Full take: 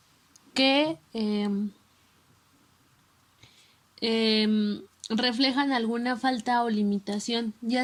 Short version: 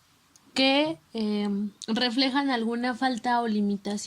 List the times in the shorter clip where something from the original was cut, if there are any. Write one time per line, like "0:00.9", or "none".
0:01.8